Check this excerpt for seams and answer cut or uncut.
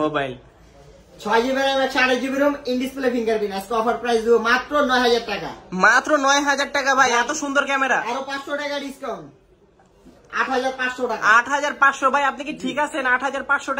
uncut